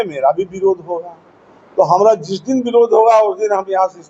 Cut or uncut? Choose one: uncut